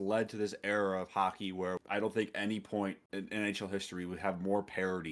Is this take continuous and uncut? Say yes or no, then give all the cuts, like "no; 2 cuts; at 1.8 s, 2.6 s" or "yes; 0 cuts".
no; 2 cuts; at 1.8 s, 3.0 s